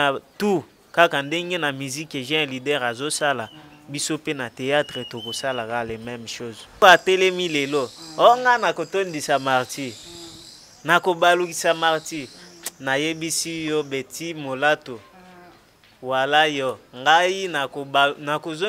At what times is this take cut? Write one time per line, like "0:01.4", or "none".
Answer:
0:06.8